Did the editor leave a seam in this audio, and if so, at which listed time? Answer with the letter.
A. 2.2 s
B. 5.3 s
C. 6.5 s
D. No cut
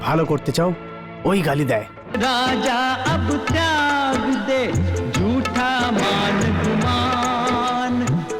A